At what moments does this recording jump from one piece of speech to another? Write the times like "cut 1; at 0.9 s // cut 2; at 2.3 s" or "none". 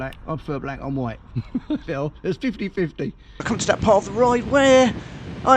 cut 1; at 3.4 s